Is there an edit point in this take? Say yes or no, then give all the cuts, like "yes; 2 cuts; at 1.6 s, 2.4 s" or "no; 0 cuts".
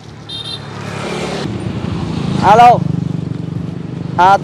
yes; 1 cut; at 1.4 s